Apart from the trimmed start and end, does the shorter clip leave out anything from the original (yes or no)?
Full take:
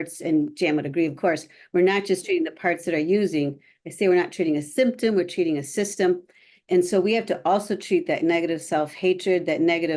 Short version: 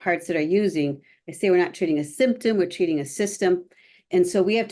no